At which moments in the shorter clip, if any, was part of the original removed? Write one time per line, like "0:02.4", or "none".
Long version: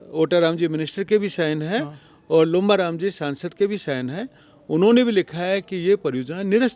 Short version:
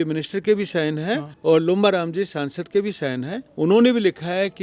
0:01.3
0:03.4